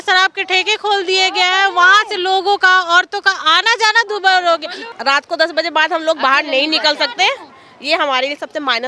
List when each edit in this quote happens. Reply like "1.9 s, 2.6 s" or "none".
4.8 s